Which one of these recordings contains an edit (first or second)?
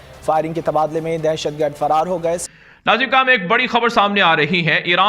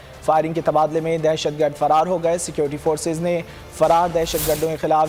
first